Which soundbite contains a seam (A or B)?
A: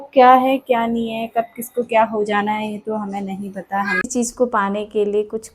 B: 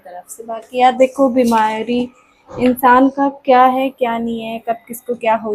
A